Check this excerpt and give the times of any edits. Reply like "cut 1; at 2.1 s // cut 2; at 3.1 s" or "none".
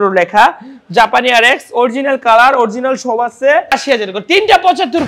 cut 1; at 3.7 s